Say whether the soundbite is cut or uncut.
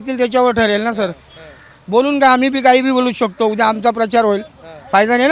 uncut